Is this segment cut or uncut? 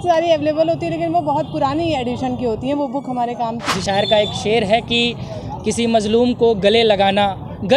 cut